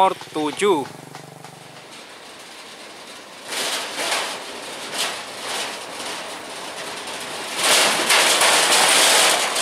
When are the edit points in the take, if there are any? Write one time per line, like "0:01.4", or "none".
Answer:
0:01.7